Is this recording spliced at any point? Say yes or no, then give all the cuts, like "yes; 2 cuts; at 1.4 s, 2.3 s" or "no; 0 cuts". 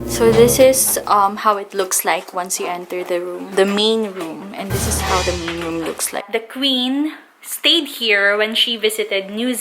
yes; 2 cuts; at 3.4 s, 6.3 s